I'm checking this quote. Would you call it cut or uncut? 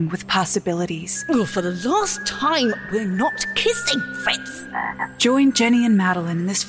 cut